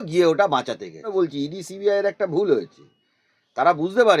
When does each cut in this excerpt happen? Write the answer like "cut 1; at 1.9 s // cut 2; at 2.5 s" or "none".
cut 1; at 1.1 s

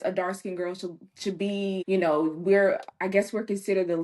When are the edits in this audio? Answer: cut 1; at 1.8 s

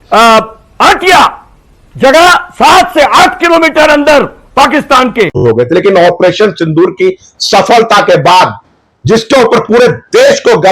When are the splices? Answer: cut 1; at 5.4 s

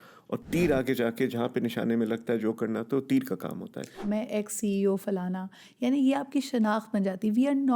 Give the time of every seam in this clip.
cut 1; at 3.9 s

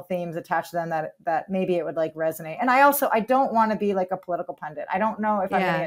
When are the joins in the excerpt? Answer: none

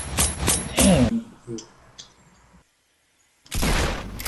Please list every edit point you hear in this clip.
cut 1; at 1.1 s

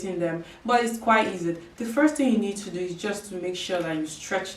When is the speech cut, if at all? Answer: none

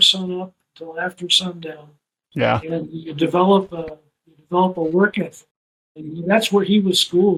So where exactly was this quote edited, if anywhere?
none

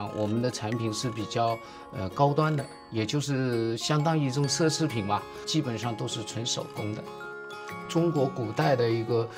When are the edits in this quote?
cut 1; at 2.8 s

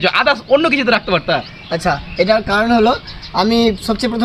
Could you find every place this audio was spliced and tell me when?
none

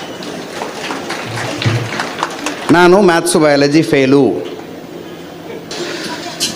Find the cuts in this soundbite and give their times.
cut 1; at 5.7 s

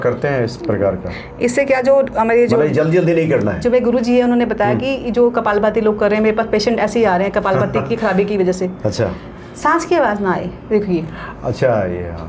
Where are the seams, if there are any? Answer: none

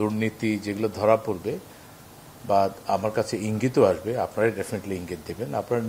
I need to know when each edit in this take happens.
none

